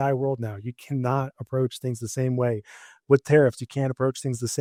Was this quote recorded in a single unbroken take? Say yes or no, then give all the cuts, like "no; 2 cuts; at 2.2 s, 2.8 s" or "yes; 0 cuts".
yes; 0 cuts